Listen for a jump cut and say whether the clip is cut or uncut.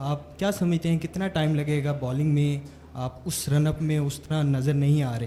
uncut